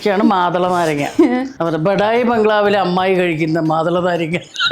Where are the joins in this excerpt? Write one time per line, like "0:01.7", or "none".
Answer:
0:01.5